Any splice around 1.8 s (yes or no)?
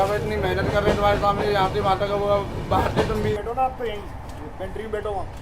no